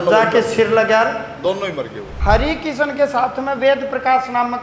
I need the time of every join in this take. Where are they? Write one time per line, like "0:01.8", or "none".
0:02.1